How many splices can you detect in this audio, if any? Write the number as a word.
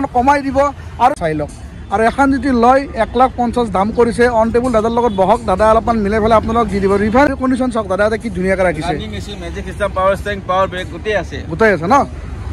two